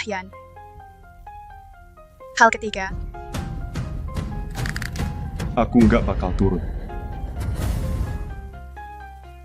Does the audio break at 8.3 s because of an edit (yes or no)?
yes